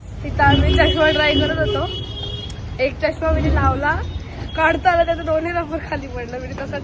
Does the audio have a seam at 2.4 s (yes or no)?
no